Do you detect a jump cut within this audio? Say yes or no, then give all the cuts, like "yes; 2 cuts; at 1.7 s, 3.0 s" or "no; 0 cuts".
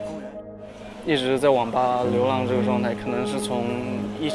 no; 0 cuts